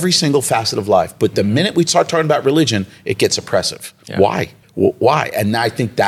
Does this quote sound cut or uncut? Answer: cut